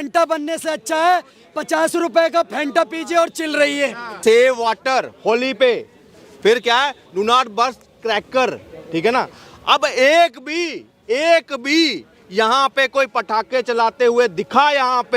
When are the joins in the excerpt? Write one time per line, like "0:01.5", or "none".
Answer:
0:04.1